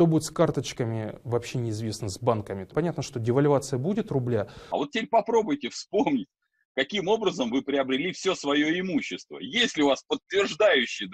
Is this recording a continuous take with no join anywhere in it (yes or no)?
no